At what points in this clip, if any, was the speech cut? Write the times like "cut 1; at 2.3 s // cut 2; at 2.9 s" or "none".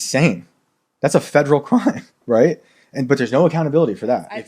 none